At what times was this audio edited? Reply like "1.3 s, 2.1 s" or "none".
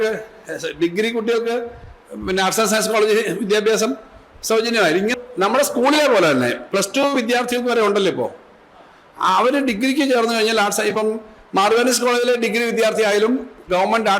5.1 s

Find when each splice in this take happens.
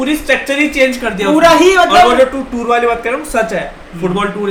none

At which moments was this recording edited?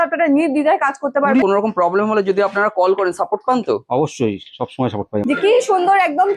1.4 s, 5.2 s

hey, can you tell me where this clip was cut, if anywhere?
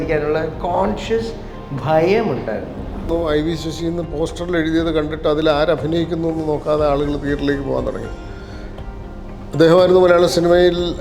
3.1 s

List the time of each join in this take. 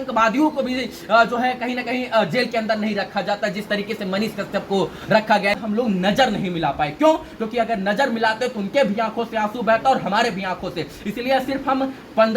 5.6 s

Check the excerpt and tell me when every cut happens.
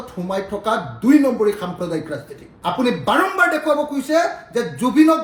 none

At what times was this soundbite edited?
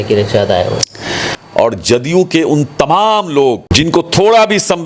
1.2 s, 3.7 s

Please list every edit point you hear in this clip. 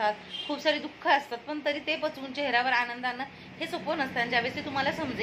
none

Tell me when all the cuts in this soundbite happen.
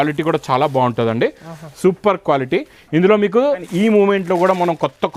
3.7 s

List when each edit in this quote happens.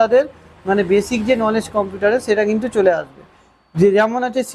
none

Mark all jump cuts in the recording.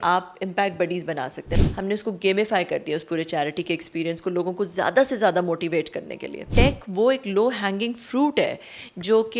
1.5 s, 6.5 s

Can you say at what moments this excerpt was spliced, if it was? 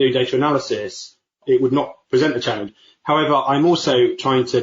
2.7 s

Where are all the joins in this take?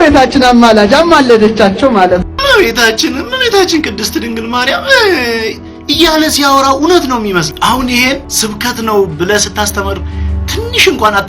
7.5 s, 8.3 s

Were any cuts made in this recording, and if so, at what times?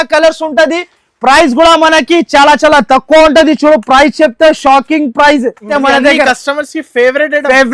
5.7 s

